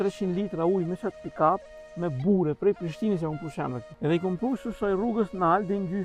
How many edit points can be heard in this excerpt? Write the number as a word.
one